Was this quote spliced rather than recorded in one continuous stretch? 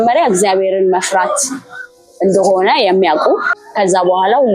yes; 1 cut; at 3.6 s

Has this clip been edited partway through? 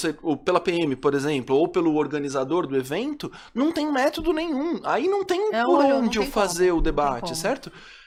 no; 0 cuts

